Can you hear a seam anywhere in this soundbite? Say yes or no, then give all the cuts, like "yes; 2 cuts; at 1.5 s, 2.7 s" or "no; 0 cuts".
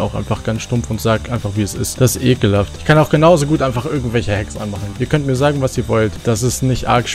yes; 2 cuts; at 1.8 s, 4.8 s